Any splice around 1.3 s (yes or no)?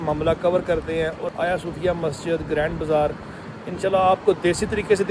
yes